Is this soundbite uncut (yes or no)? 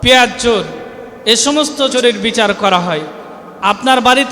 no